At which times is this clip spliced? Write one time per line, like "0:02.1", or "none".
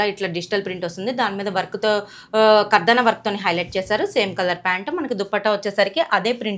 none